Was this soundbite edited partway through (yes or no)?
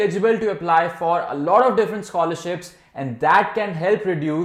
no